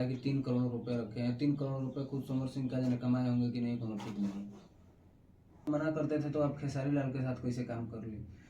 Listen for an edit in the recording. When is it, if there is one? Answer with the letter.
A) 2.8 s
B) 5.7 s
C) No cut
B